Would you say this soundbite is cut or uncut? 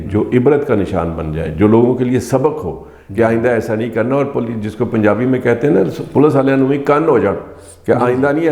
uncut